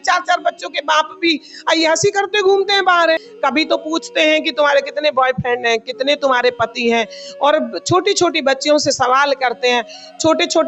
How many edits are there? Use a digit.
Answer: 1